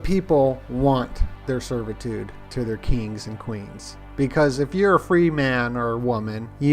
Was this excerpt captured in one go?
no; 1 cut; at 1.3 s

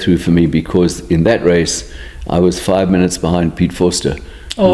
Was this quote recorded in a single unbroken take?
yes; 0 cuts

